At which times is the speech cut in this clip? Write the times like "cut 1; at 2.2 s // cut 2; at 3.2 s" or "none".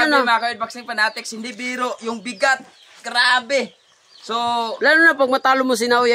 none